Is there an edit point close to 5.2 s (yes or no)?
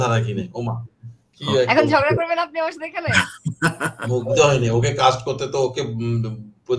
no